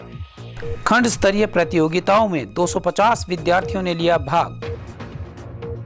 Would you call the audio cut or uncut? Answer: uncut